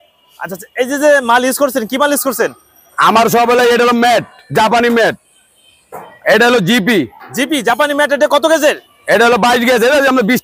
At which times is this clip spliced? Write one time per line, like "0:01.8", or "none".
none